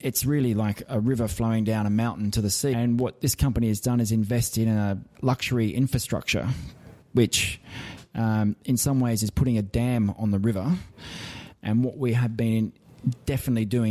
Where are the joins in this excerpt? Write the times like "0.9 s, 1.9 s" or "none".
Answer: 2.7 s, 5.1 s